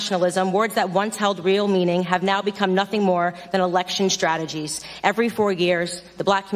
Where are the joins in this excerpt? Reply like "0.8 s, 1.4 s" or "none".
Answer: none